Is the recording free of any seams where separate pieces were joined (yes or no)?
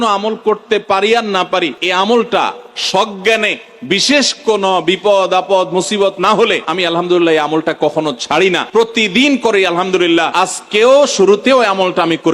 no